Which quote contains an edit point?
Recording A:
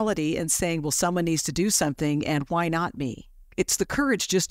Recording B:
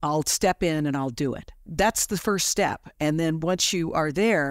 A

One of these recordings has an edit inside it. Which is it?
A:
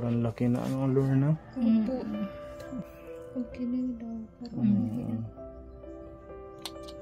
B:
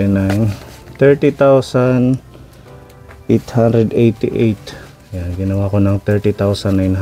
A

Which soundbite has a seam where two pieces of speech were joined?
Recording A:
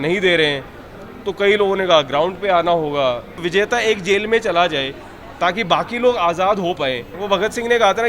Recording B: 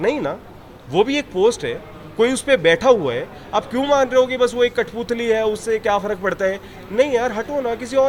A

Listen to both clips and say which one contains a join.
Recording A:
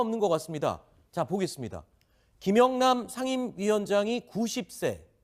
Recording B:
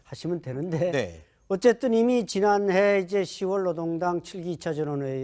B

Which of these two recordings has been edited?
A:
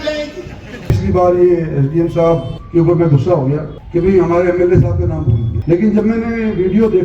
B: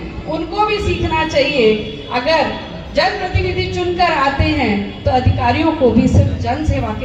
A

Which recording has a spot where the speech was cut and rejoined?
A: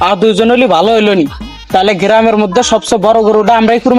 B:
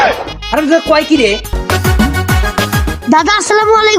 B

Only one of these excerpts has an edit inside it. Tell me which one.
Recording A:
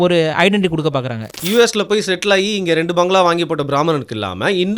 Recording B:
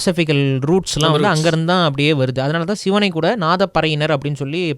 A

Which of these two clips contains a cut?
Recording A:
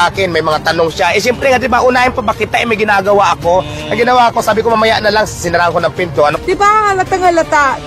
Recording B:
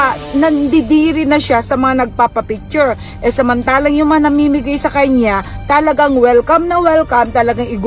A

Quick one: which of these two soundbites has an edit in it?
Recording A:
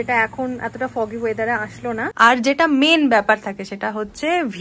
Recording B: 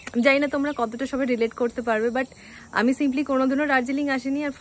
A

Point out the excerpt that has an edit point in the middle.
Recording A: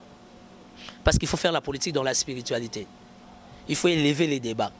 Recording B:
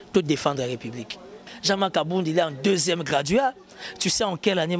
B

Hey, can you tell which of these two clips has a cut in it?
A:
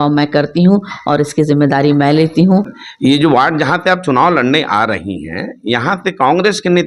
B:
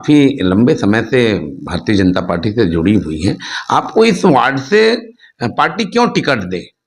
A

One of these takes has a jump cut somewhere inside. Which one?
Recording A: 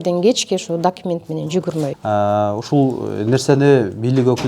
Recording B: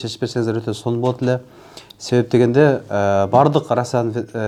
A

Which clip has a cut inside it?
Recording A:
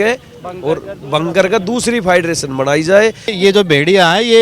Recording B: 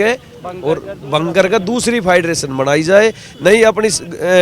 A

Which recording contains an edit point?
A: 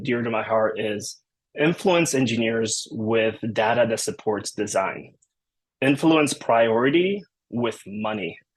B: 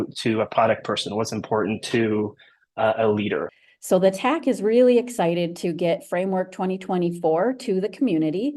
B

